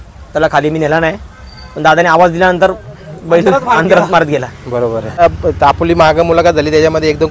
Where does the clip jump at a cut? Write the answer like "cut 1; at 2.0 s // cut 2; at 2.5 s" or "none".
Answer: cut 1; at 5.2 s